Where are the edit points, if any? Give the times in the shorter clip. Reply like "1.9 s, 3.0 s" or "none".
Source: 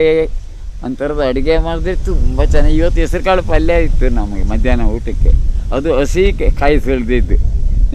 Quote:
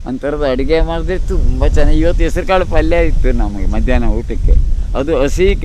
none